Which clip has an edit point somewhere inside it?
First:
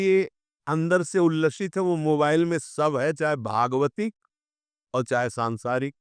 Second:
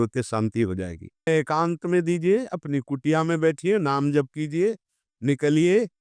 second; 1 cut; at 1.3 s

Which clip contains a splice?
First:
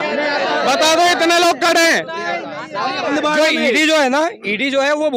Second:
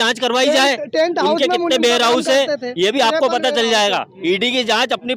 first; 1 cut; at 3.1 s

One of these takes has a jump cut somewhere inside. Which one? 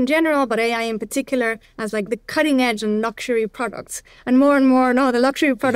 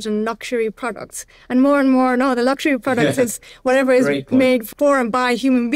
second; 1 cut; at 4.7 s

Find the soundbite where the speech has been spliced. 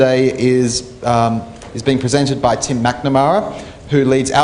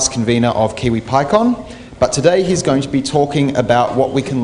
first; 1 cut; at 3.0 s

